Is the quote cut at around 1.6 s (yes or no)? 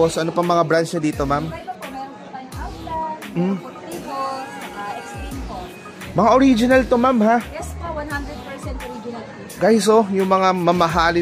no